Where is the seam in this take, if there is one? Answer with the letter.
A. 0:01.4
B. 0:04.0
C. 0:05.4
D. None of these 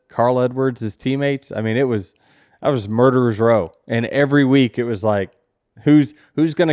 D